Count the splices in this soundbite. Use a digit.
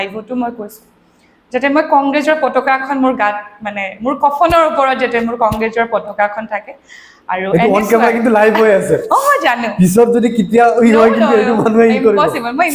0